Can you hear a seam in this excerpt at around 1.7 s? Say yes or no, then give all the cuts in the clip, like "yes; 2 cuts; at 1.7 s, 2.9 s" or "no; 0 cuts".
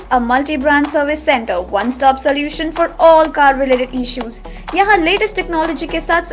no; 0 cuts